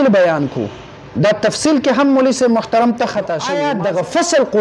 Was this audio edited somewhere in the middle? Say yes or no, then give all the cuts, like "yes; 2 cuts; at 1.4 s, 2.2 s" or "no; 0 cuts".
yes; 1 cut; at 3.7 s